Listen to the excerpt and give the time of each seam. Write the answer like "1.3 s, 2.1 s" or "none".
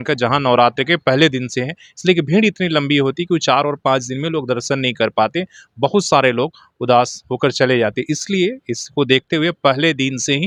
none